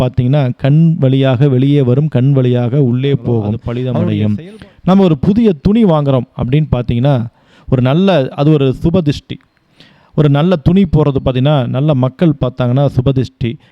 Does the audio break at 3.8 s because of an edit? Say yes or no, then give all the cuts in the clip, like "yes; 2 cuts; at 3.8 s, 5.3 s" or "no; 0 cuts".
yes; 1 cut; at 3.8 s